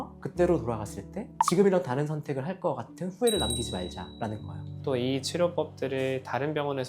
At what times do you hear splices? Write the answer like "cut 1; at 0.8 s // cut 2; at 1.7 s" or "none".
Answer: cut 1; at 4.7 s